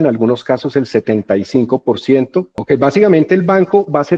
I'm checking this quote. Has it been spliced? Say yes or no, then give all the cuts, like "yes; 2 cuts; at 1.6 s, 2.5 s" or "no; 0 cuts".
yes; 1 cut; at 2.5 s